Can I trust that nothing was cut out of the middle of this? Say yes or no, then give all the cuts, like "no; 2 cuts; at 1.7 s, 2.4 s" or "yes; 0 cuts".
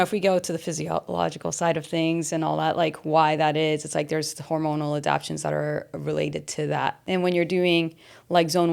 no; 1 cut; at 7.0 s